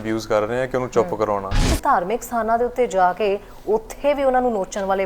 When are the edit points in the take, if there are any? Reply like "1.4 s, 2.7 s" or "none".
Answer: 1.7 s